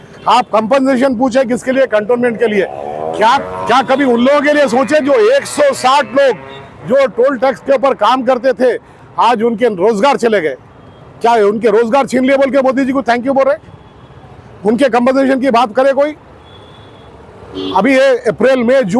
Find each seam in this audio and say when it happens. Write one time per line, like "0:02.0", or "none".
0:03.4